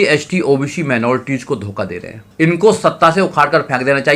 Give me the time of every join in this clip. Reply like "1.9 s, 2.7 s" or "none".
2.2 s